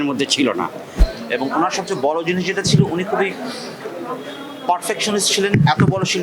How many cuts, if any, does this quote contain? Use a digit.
1